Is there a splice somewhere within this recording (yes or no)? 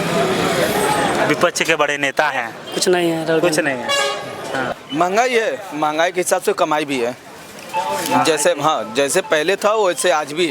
yes